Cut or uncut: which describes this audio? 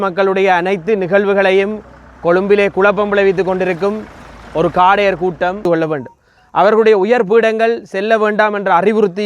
cut